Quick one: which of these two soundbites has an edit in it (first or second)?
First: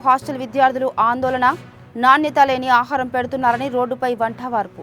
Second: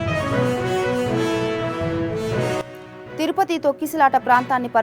second